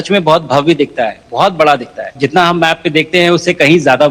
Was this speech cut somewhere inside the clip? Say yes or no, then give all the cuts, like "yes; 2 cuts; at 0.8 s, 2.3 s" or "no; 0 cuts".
yes; 1 cut; at 2.1 s